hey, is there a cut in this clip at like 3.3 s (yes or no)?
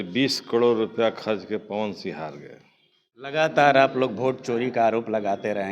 yes